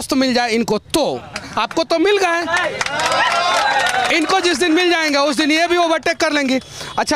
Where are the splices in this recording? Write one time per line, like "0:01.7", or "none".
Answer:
none